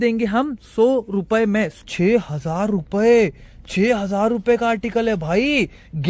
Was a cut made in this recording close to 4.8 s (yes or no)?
no